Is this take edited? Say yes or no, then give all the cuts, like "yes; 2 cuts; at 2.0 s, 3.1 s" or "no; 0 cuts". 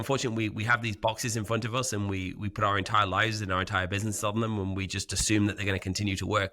no; 0 cuts